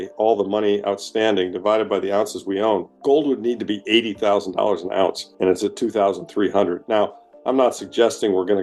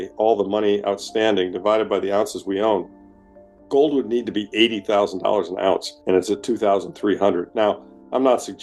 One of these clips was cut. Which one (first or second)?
first